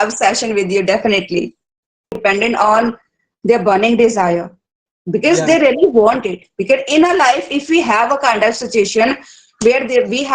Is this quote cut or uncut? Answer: cut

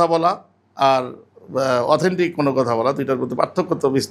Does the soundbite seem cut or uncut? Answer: uncut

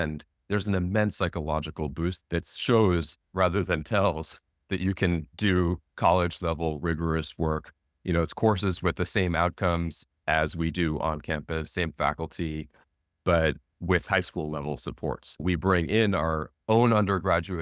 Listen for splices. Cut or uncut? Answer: cut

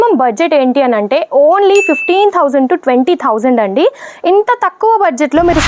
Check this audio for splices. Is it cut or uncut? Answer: uncut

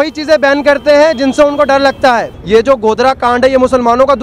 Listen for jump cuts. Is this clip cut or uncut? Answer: cut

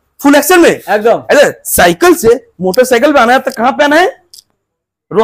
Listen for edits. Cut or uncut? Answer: uncut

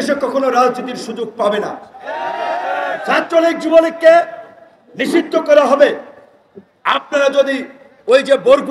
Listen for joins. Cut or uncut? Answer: uncut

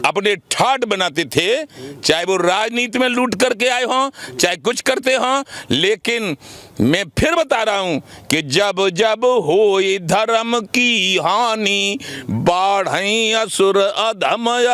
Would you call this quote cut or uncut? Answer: uncut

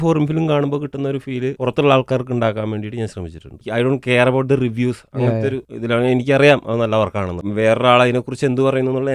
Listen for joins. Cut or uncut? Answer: cut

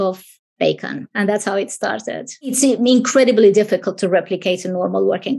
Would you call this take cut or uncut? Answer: cut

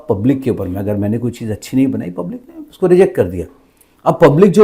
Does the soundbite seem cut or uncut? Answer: uncut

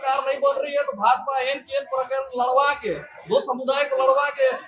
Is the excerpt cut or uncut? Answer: uncut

